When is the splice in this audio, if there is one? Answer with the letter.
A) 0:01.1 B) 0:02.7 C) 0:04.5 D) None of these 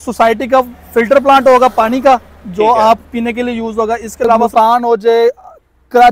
C